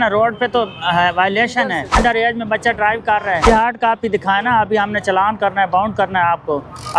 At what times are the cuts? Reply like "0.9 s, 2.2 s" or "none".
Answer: 2.0 s, 3.4 s

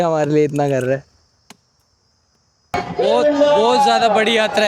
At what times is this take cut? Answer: 2.8 s

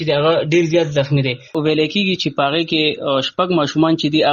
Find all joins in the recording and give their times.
1.4 s

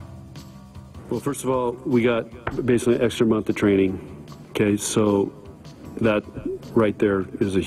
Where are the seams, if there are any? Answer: 1.1 s

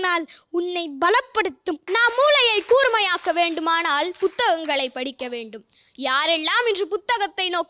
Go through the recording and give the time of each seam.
1.8 s

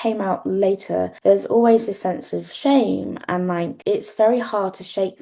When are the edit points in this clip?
1.1 s, 3.8 s

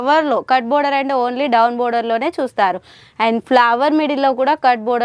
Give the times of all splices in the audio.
none

